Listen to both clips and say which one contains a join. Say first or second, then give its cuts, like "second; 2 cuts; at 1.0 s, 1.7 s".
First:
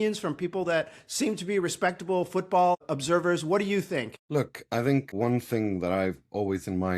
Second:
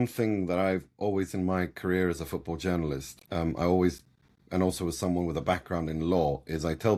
first; 1 cut; at 4.2 s